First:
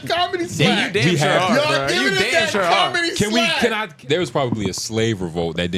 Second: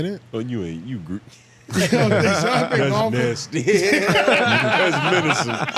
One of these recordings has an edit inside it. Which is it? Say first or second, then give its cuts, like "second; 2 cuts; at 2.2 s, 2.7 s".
first; 1 cut; at 3.9 s